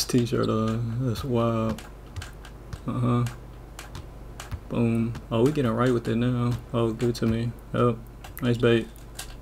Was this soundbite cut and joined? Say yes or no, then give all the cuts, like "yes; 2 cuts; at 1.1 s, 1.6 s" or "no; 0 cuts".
no; 0 cuts